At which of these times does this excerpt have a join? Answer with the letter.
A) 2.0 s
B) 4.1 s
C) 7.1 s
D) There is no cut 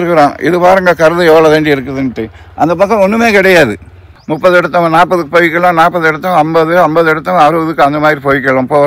B